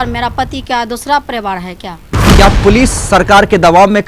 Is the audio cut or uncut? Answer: cut